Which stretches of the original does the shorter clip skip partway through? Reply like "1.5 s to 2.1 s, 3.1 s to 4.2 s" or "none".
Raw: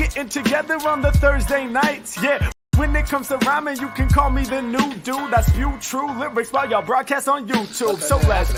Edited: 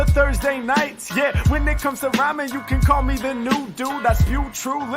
2.5 s to 2.7 s